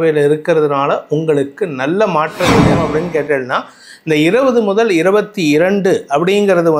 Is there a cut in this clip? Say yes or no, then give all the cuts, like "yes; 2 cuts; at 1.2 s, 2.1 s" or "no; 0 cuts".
yes; 1 cut; at 2.7 s